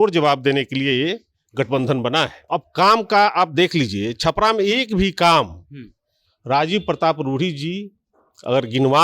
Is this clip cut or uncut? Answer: cut